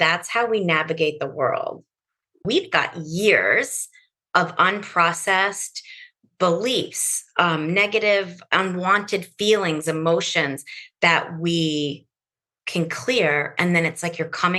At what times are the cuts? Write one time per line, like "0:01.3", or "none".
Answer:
0:02.4